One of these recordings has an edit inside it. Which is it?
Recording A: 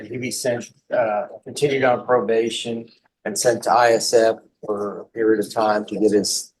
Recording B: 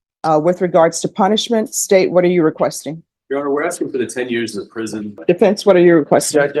B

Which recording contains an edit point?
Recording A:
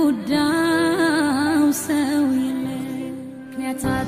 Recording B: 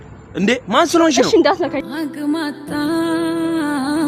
B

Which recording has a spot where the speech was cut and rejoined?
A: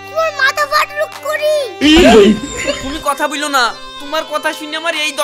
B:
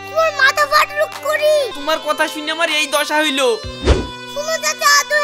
B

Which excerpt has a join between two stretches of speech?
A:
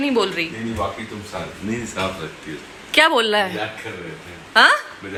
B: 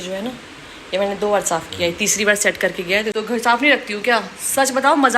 B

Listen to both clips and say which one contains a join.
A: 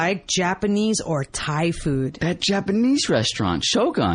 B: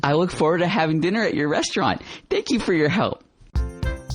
B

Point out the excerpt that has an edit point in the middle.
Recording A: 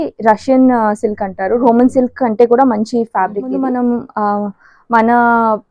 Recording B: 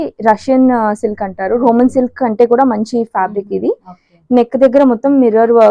A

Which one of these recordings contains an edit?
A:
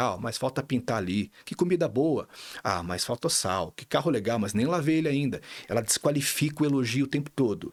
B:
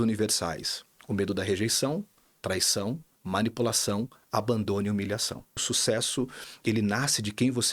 B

